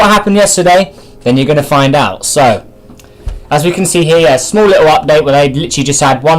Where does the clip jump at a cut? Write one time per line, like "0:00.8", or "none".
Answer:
0:05.4